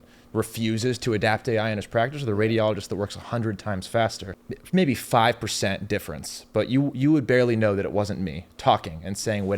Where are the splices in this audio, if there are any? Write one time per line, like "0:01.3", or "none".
0:04.2